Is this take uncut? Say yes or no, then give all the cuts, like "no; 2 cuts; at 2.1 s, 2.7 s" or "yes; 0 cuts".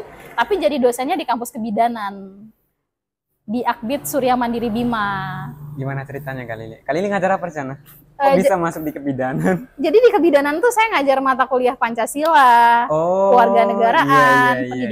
yes; 0 cuts